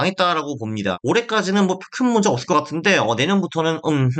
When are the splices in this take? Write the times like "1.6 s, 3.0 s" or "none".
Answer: 1.0 s